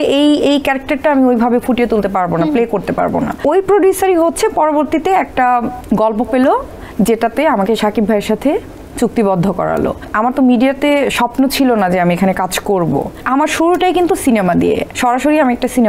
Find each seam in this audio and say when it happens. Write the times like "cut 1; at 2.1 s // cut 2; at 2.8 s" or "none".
cut 1; at 3.4 s // cut 2; at 5.8 s // cut 3; at 10.0 s // cut 4; at 13.2 s // cut 5; at 14.9 s